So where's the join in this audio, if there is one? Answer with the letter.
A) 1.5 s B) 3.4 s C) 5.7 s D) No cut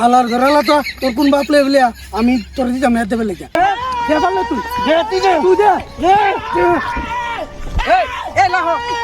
B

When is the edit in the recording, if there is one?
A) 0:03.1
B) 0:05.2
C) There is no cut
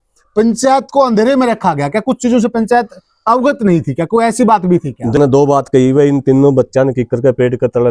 B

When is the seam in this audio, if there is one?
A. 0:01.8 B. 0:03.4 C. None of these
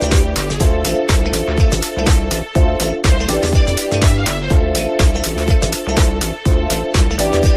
B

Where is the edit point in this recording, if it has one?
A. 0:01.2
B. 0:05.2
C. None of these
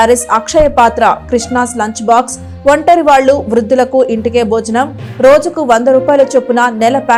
C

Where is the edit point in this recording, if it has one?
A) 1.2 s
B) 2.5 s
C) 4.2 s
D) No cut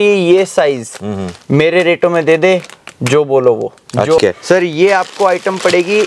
C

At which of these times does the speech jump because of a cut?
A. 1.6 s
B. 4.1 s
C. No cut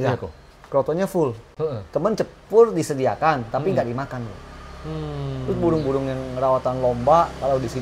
C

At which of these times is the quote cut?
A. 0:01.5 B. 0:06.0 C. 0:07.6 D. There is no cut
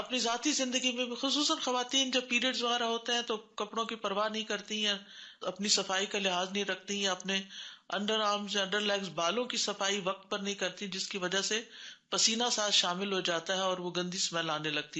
D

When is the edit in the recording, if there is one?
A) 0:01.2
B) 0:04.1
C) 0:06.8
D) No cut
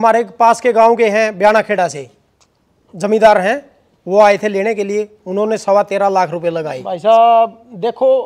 C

